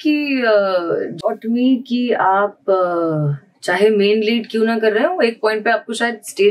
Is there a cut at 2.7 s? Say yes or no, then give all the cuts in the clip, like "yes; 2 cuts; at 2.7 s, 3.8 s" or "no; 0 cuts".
no; 1 cut; at 1.2 s